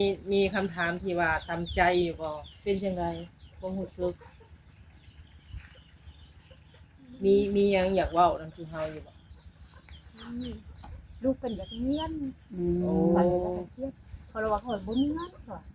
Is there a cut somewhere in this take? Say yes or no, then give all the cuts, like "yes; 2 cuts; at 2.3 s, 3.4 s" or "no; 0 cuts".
yes; 1 cut; at 2.5 s